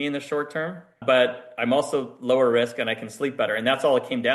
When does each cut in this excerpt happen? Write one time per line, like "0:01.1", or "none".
0:01.0

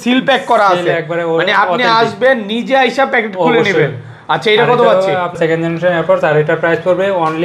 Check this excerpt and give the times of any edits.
0:05.4

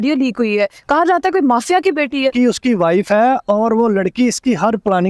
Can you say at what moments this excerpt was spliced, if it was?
0:02.3

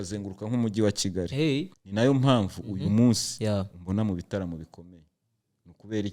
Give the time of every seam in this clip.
0:01.7

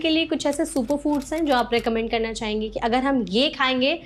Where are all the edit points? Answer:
none

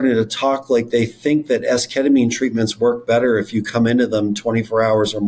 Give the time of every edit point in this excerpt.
none

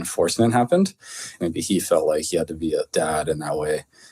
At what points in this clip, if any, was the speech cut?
0:01.4
0:02.9

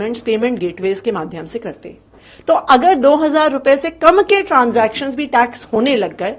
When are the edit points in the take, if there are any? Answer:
none

